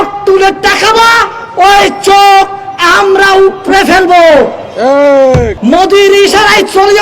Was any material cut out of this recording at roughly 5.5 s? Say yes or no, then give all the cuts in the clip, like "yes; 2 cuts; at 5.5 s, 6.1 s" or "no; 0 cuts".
yes; 1 cut; at 5.5 s